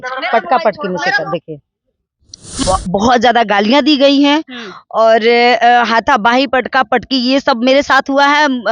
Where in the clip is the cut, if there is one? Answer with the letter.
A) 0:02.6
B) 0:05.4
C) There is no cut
A